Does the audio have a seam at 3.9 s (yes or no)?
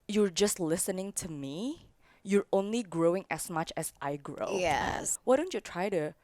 no